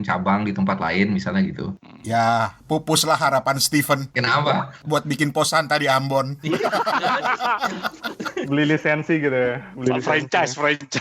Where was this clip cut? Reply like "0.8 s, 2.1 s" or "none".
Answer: 4.3 s